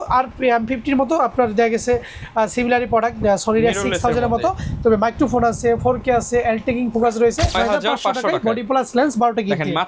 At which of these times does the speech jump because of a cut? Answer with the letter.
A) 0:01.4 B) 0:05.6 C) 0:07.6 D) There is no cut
C